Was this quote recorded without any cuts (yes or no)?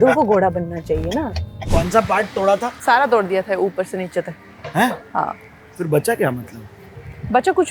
no